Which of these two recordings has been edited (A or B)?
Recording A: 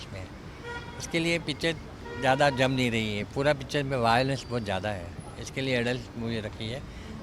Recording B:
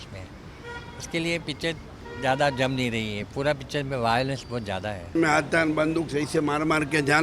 B